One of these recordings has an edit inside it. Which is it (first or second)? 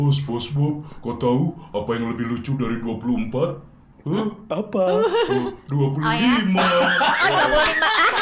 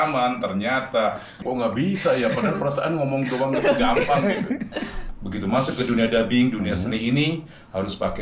second